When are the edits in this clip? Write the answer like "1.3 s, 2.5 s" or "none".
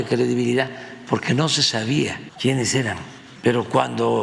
2.3 s